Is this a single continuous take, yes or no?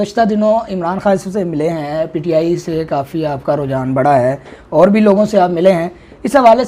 yes